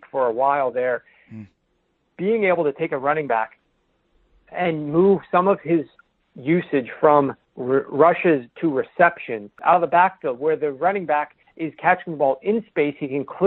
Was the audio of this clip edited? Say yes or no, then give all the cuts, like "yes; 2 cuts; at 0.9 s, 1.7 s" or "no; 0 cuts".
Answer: yes; 1 cut; at 9.5 s